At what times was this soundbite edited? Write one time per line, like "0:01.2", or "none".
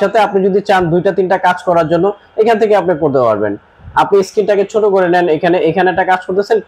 none